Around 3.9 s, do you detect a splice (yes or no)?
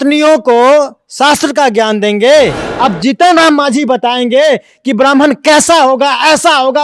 no